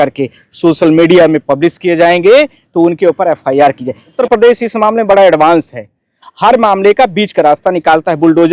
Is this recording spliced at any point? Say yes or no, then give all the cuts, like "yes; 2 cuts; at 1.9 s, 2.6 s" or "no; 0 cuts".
yes; 1 cut; at 4.1 s